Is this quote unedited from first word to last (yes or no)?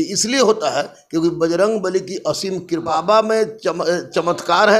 no